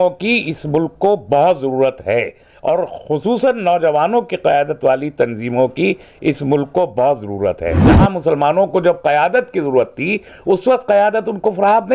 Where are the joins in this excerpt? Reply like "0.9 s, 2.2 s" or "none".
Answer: 7.9 s